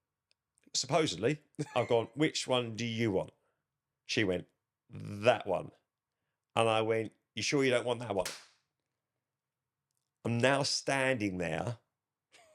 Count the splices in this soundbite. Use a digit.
1